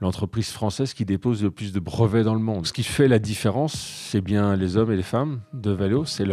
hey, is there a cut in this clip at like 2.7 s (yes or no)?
yes